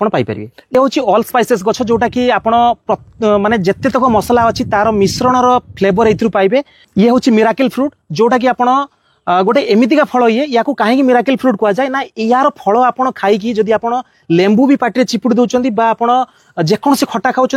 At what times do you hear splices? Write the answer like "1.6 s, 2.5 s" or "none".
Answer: 6.8 s